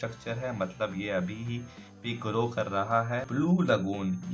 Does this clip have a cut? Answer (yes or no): yes